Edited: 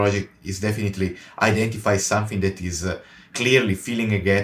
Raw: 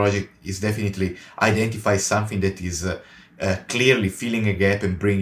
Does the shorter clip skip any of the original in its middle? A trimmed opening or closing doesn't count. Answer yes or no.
yes